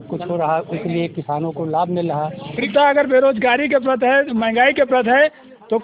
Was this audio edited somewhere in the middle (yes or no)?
yes